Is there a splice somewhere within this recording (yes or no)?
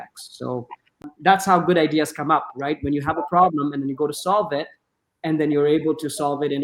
yes